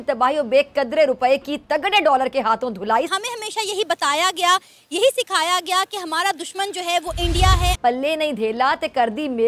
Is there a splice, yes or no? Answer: yes